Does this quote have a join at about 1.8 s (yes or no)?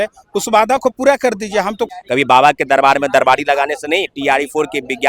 yes